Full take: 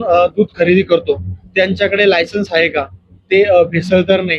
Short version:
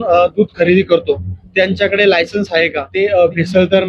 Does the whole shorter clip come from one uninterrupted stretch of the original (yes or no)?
no